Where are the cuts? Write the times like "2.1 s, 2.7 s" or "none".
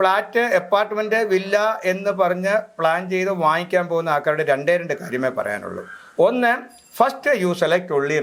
none